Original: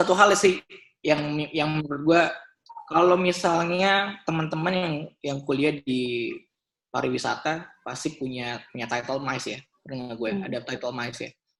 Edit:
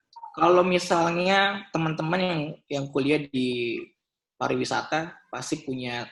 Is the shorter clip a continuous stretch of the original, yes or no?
yes